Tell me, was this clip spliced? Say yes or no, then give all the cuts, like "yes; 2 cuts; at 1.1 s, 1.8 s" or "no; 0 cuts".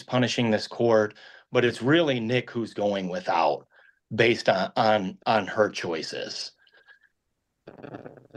no; 0 cuts